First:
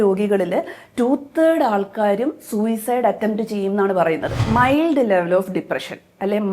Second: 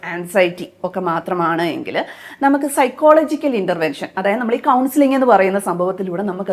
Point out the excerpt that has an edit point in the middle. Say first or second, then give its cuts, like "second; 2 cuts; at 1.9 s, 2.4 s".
first; 1 cut; at 4.5 s